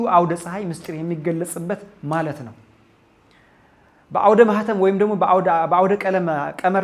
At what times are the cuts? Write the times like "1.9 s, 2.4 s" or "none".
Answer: none